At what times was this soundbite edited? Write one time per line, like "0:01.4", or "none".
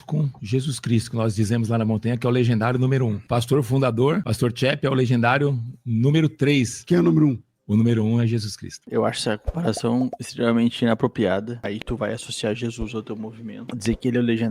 0:03.2
0:04.3
0:06.8
0:08.8